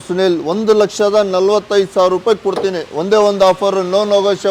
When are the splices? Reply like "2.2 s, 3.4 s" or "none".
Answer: none